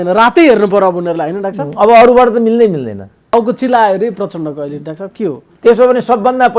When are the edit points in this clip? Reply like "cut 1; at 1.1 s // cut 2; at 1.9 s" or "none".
cut 1; at 3.3 s